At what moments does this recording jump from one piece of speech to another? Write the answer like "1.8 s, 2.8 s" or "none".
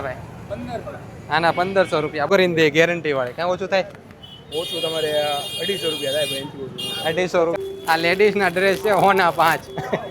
2.3 s, 7.6 s